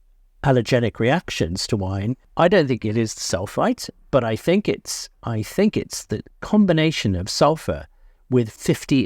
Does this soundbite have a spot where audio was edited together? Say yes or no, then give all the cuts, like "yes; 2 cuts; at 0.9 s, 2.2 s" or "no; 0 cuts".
yes; 1 cut; at 2.2 s